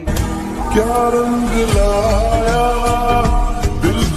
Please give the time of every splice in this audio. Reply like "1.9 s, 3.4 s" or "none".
none